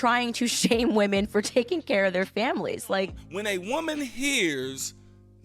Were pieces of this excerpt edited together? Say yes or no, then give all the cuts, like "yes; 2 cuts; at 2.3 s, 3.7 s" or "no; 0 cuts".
yes; 1 cut; at 3.2 s